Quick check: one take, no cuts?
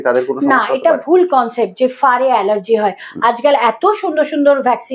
yes; 0 cuts

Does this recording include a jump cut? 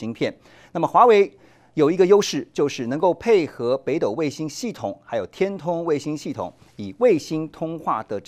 no; 0 cuts

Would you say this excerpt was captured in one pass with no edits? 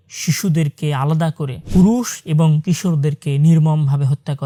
yes; 0 cuts

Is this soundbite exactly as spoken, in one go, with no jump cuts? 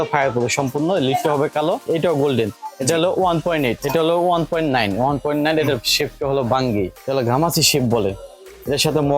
no; 3 cuts; at 1.8 s, 3.8 s, 7.0 s

